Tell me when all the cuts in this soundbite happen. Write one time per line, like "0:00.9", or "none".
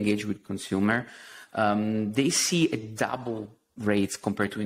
0:03.7